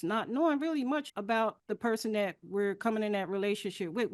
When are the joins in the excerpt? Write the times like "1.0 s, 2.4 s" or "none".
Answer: 1.3 s